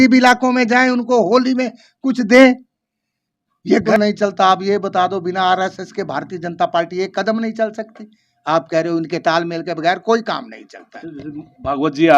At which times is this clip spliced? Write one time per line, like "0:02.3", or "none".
0:03.8